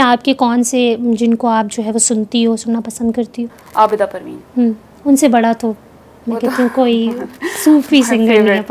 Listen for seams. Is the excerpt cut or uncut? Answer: uncut